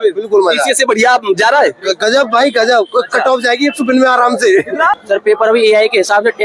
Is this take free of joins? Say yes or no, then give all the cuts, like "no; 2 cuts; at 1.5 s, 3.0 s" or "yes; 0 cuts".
no; 1 cut; at 5.0 s